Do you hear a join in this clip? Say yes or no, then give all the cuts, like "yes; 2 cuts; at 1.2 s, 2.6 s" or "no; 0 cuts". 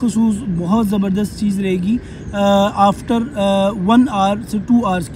no; 0 cuts